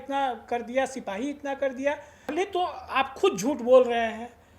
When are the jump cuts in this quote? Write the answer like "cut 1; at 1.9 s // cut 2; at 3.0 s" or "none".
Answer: cut 1; at 2.3 s